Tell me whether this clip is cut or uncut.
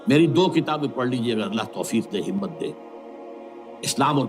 uncut